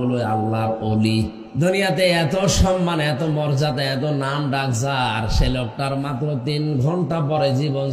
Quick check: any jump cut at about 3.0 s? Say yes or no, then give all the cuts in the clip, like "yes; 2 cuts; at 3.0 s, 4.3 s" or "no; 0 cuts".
no; 1 cut; at 1.4 s